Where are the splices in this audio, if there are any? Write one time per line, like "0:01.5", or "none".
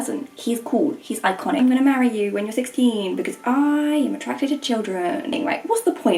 0:01.6
0:05.4